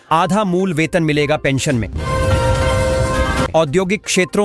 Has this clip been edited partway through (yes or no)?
yes